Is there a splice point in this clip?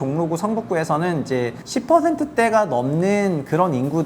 yes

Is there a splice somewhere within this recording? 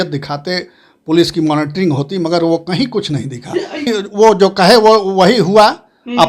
yes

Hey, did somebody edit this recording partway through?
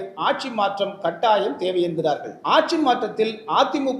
yes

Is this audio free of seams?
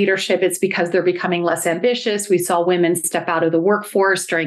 yes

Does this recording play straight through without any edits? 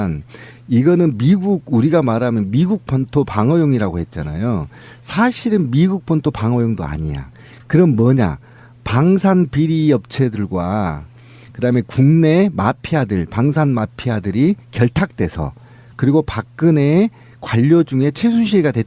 no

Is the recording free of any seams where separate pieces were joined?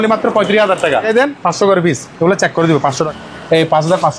no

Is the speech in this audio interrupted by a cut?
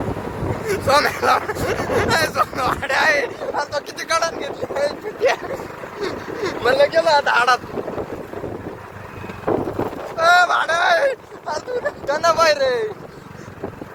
no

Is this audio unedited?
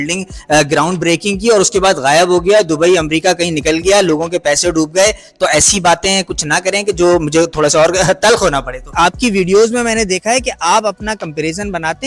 no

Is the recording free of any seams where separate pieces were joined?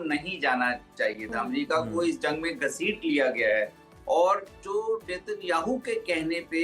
yes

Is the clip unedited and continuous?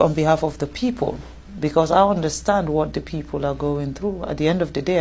yes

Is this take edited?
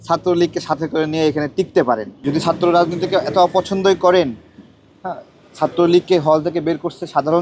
yes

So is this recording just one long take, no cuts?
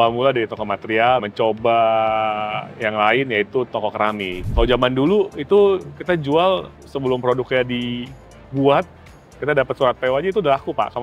no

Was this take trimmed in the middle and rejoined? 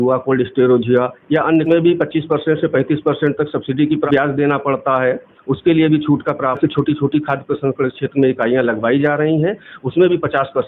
yes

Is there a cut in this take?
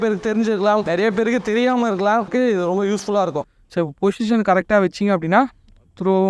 yes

